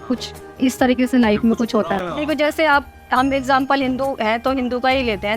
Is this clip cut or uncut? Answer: cut